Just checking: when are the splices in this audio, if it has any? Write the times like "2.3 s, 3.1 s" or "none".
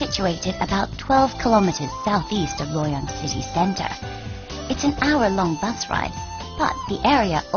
6.5 s